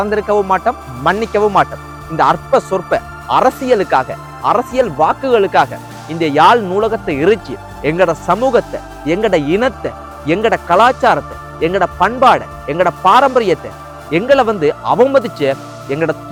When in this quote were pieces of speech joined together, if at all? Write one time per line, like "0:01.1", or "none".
none